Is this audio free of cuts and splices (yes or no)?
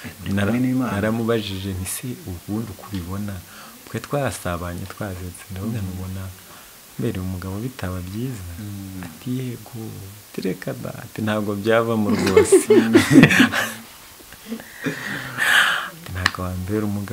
yes